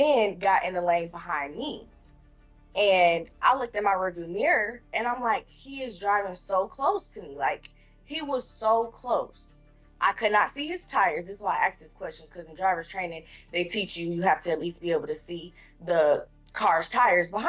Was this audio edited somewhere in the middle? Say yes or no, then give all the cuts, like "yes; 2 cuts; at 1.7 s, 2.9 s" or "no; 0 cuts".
no; 0 cuts